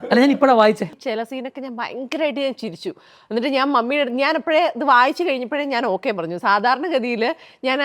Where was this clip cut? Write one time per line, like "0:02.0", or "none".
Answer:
0:00.9

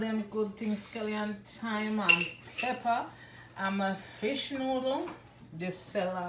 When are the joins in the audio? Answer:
none

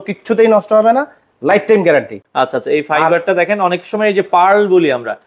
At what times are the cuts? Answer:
none

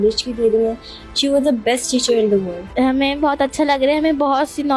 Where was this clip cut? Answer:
none

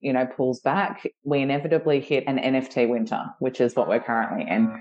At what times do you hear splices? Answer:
0:01.1
0:02.2

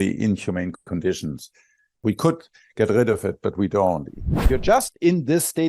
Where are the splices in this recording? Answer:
0:02.0
0:04.5

